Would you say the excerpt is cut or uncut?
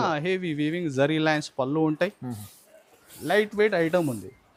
uncut